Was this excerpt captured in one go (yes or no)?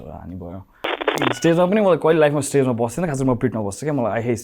no